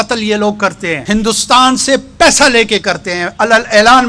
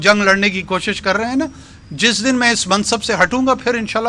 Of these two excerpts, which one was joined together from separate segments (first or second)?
first